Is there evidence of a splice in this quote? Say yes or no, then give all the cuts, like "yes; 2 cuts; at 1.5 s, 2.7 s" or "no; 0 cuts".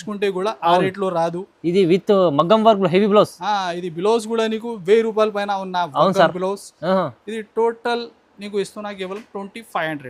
no; 0 cuts